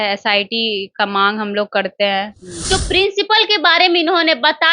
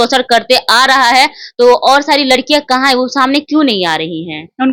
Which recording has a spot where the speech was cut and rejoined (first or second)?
first